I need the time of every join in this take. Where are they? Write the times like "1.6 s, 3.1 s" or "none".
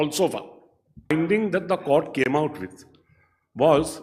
1.1 s